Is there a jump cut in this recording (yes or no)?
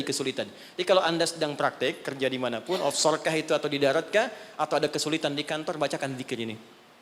no